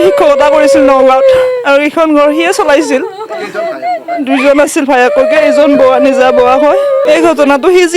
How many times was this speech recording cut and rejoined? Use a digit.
1